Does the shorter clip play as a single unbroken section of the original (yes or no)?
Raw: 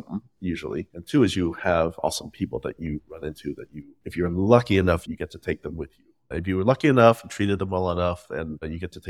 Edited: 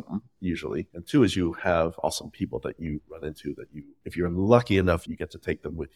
yes